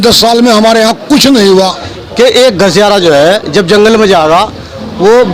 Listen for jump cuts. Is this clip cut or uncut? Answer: cut